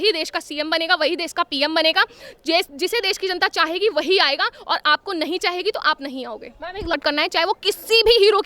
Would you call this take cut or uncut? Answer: cut